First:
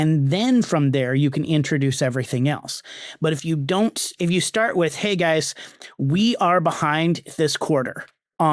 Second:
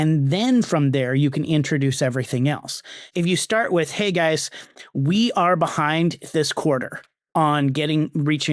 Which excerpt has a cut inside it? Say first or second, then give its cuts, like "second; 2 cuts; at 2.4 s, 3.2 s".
second; 1 cut; at 3.0 s